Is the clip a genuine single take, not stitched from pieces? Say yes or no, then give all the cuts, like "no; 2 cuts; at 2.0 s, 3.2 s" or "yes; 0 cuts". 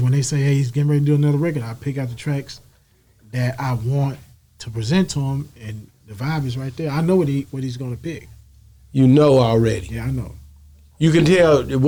yes; 0 cuts